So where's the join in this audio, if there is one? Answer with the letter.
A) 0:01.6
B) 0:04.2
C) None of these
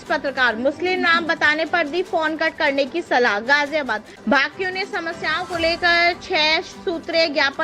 B